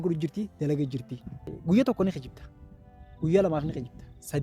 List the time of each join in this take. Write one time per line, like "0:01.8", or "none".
0:01.5